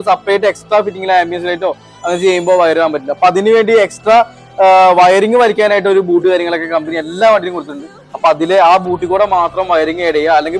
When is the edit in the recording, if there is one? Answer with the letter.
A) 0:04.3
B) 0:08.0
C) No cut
C